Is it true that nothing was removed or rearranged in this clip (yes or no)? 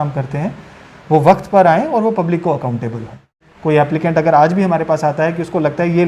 no